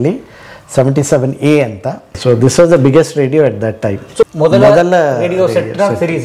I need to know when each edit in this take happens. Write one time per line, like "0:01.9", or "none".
0:02.1
0:04.3